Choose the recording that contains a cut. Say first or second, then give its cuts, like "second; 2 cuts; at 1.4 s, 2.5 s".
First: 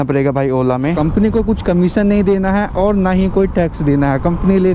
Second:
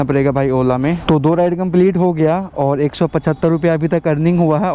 first; 1 cut; at 1.0 s